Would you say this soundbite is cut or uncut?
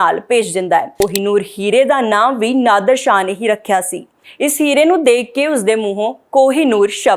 cut